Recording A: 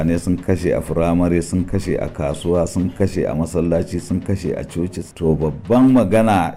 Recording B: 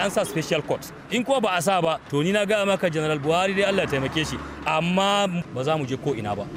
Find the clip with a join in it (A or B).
B